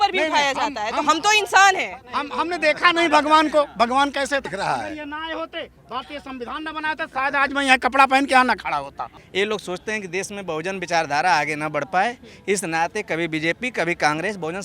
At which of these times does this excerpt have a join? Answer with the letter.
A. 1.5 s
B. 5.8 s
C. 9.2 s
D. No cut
C